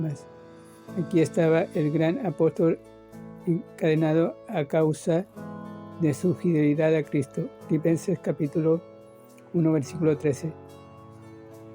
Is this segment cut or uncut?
cut